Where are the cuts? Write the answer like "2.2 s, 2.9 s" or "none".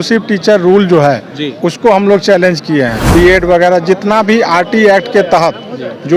3.0 s